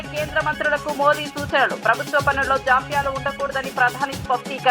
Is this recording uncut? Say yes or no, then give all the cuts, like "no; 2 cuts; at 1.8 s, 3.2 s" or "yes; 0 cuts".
yes; 0 cuts